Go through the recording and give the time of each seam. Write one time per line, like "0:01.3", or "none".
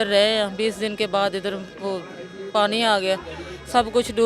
none